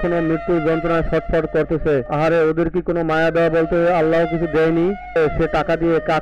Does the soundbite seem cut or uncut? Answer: cut